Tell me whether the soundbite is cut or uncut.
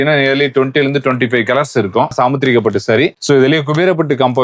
cut